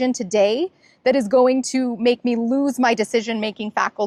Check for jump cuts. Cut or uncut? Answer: uncut